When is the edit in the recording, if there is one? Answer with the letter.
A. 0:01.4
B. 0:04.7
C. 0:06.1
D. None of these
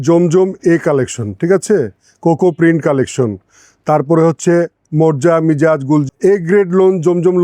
C